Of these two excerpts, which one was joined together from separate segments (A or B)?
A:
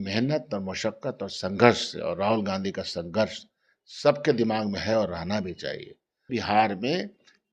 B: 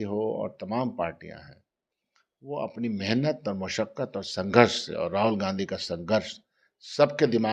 A